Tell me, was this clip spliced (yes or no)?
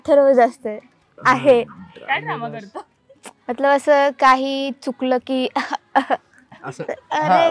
no